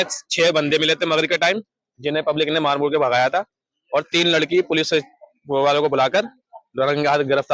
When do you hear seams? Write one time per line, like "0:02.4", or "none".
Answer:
none